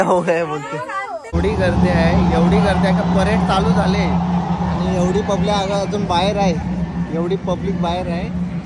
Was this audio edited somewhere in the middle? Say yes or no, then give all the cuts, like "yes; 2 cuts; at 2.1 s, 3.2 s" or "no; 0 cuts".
yes; 1 cut; at 1.2 s